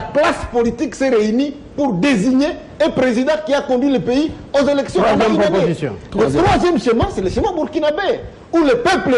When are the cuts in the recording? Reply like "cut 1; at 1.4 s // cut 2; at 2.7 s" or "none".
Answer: none